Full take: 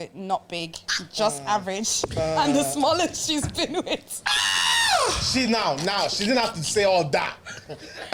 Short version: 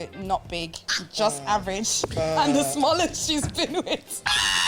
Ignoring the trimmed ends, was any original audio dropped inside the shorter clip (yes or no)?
no